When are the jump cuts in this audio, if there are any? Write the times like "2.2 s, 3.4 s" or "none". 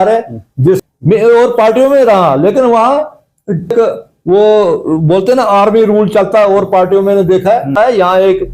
0.8 s, 3.7 s, 7.8 s